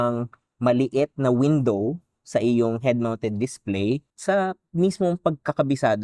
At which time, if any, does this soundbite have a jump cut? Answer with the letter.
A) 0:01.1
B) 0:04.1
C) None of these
B